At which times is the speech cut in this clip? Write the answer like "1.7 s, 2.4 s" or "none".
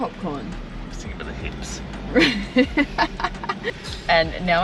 3.7 s